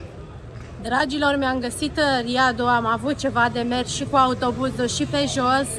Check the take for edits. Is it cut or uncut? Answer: uncut